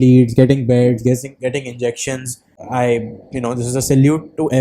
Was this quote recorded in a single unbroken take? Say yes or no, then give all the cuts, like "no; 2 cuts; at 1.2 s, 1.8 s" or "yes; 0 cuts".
no; 1 cut; at 2.5 s